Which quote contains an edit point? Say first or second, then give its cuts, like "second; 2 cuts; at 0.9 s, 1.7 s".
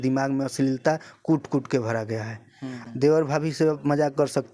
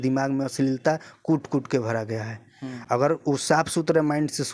first; 1 cut; at 2.8 s